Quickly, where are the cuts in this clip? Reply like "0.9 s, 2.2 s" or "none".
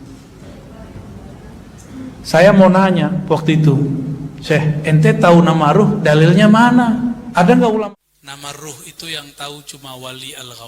7.8 s